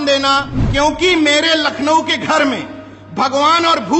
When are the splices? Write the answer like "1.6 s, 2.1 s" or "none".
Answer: 1.1 s